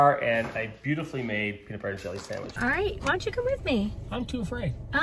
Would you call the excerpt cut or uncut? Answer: cut